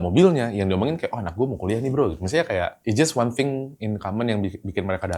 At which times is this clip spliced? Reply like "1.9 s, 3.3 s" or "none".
2.8 s